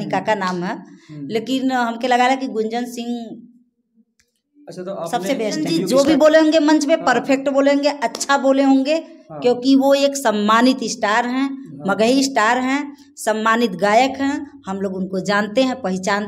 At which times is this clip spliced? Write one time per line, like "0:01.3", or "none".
0:05.8